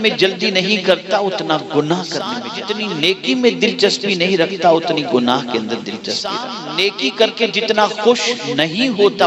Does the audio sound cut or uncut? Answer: cut